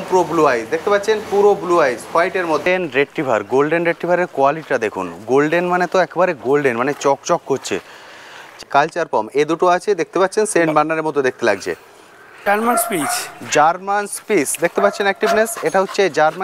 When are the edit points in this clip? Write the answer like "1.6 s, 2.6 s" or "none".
2.6 s, 8.5 s, 12.4 s